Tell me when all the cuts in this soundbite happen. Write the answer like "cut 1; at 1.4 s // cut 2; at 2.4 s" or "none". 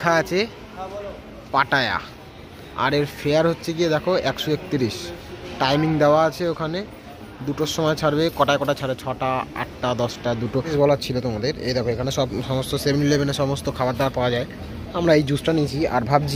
cut 1; at 10.7 s